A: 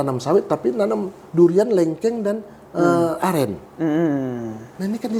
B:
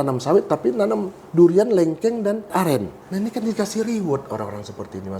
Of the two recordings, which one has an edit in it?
B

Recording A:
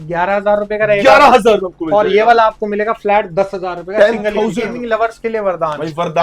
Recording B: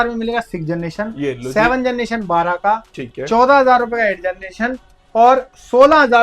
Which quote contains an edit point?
A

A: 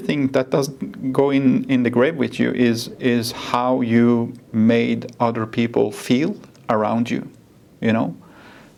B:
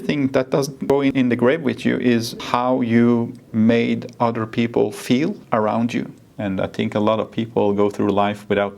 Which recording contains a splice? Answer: B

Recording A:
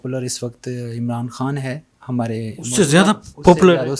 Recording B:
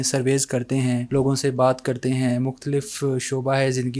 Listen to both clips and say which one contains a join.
B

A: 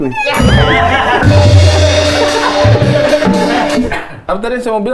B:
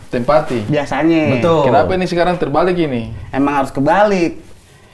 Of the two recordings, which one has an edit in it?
A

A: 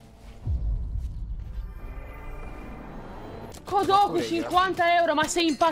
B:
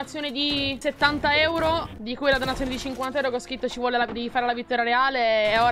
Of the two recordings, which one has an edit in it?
A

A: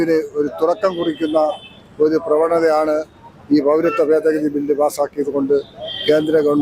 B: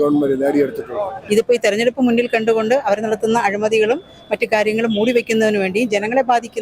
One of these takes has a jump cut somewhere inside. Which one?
B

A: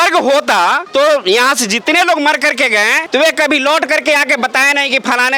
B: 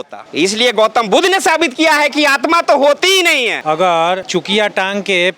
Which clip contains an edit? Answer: B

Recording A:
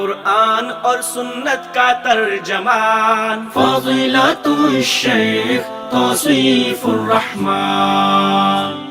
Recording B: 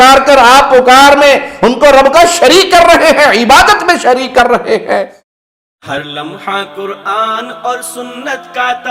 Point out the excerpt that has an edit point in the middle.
B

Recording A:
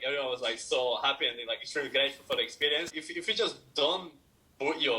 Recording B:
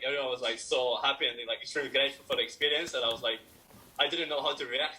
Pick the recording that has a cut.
A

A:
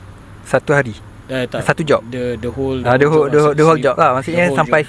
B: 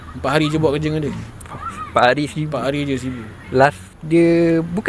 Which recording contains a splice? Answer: B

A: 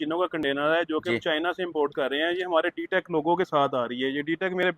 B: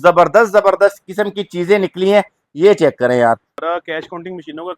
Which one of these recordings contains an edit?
B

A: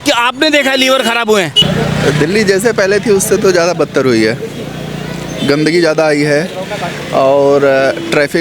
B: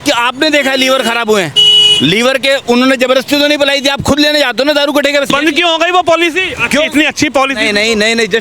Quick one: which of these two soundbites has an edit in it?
A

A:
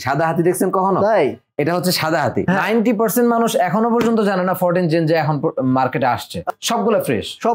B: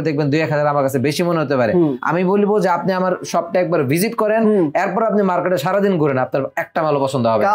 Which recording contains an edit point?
A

